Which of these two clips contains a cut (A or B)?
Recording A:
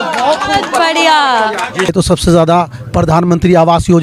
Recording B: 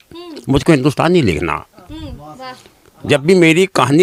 A